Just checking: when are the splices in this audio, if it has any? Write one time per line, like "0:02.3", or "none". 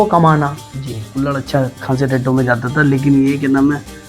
0:01.1